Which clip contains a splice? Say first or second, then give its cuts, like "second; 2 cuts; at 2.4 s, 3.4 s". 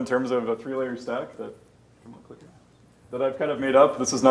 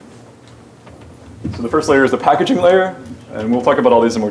second; 1 cut; at 1.9 s